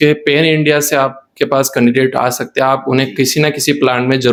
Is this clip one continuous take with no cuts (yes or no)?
yes